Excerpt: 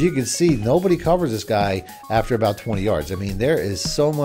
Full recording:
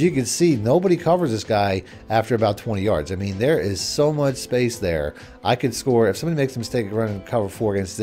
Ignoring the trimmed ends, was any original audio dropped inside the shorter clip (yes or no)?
no